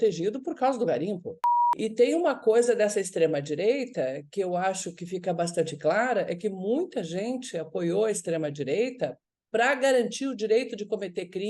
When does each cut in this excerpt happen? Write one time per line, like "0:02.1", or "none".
0:01.7